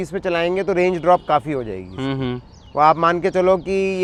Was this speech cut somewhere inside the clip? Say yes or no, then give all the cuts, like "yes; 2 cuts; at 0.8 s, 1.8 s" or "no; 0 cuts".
no; 0 cuts